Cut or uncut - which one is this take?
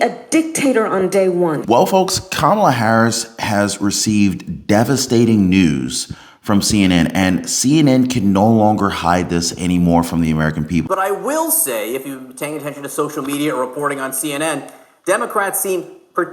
cut